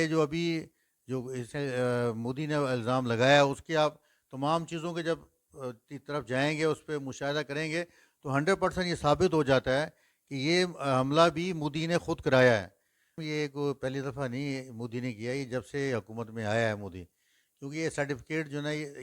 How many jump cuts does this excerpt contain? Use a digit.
1